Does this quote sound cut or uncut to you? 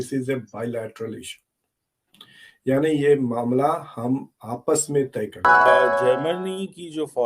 cut